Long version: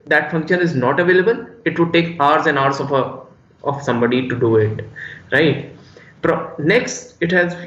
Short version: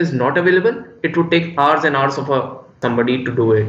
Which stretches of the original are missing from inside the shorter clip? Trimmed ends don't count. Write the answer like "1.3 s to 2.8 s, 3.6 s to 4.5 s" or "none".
3.4 s to 3.8 s